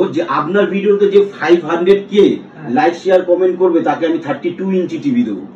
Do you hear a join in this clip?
no; 0 cuts

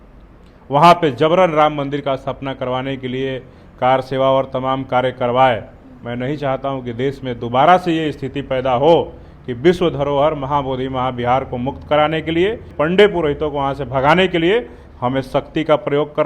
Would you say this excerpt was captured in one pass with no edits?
no; 1 cut; at 12.7 s

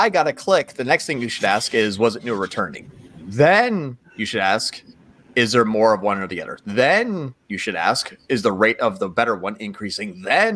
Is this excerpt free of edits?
yes; 0 cuts

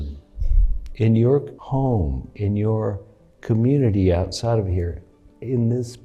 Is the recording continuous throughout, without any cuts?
no; 1 cut; at 1.6 s

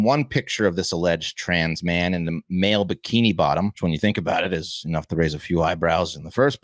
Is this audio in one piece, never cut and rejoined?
no; 1 cut; at 3.8 s

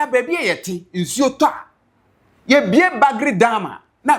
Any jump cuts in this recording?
no; 0 cuts

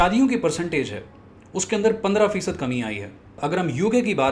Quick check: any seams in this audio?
yes; 1 cut; at 3.4 s

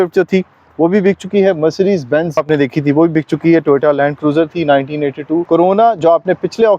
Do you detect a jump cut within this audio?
yes; 2 cuts; at 2.4 s, 5.4 s

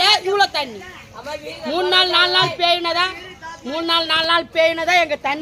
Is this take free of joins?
yes; 0 cuts

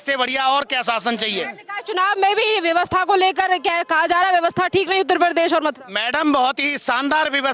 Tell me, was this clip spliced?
no; 0 cuts

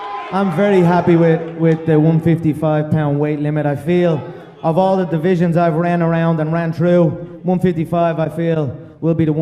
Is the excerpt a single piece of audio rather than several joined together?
no; 1 cut; at 6.4 s

